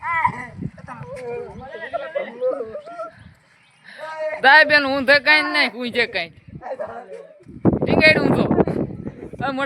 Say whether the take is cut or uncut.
uncut